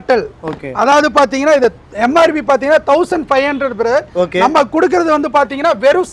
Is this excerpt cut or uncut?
uncut